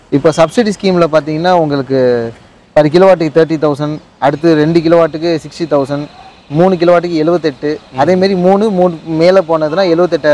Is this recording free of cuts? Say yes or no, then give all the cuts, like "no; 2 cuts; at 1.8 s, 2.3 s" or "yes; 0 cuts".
yes; 0 cuts